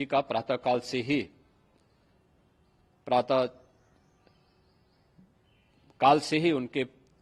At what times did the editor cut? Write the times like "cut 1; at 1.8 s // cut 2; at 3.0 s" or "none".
none